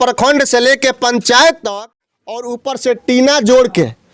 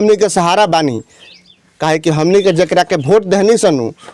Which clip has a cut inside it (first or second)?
first